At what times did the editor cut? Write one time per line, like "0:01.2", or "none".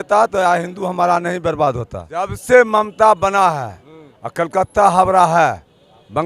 0:02.4